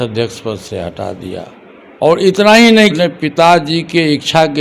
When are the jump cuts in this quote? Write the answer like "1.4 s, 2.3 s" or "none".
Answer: 2.9 s